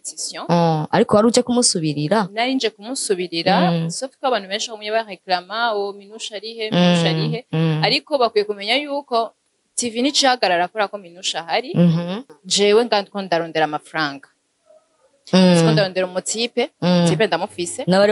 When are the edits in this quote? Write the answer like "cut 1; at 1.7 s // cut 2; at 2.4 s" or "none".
cut 1; at 12.2 s